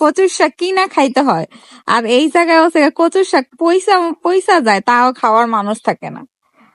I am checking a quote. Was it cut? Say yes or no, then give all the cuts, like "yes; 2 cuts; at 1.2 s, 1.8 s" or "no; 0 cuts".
no; 0 cuts